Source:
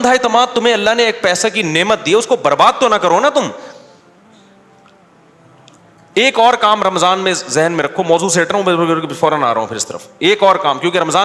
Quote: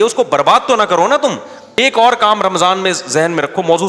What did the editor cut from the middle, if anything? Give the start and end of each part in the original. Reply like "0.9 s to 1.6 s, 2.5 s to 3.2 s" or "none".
3.9 s to 6.2 s